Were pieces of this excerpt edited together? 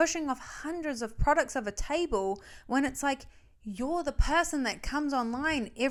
no; 0 cuts

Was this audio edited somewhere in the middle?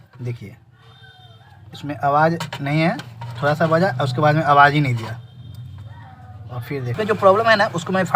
yes; 1 cut; at 6.9 s

